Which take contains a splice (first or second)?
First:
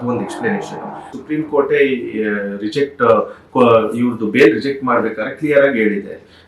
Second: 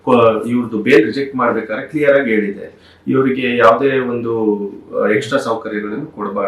first